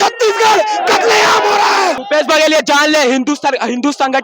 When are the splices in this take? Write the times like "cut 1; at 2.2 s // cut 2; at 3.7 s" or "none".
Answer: cut 1; at 2.0 s